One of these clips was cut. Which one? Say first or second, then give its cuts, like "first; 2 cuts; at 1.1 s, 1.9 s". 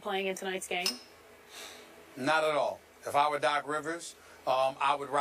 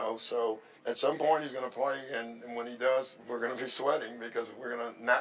first; 1 cut; at 1.8 s